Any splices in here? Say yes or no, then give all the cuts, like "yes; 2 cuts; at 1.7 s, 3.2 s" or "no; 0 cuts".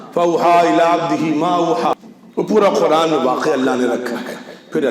yes; 1 cut; at 2.1 s